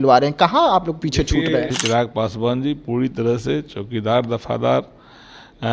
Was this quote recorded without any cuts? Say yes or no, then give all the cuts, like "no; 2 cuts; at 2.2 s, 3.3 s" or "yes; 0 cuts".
no; 1 cut; at 1.8 s